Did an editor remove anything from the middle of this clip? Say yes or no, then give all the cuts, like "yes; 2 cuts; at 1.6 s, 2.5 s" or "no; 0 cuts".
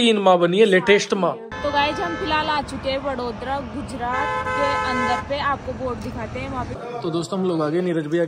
yes; 2 cuts; at 1.5 s, 6.8 s